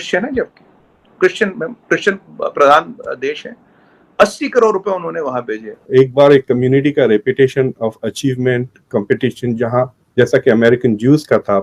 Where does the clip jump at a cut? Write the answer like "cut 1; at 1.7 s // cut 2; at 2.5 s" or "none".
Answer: cut 1; at 5.7 s